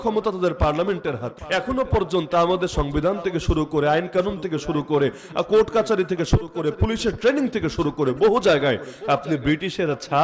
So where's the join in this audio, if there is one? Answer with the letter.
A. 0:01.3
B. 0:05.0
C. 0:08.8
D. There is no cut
A